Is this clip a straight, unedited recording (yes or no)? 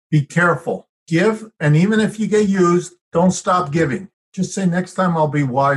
no